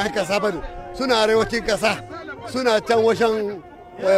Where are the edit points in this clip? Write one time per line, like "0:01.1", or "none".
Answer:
none